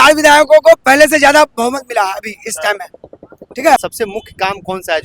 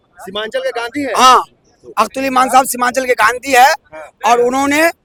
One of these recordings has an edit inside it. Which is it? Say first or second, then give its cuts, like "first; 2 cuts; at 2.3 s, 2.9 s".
first; 1 cut; at 3.8 s